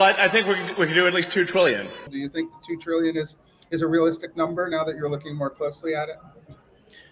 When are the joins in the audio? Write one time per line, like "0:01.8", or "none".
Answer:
0:02.0